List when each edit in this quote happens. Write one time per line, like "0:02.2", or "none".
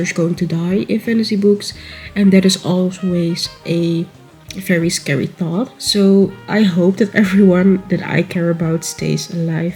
none